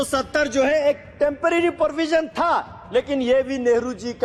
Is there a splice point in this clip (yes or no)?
no